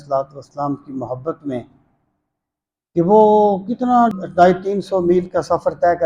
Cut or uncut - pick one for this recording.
cut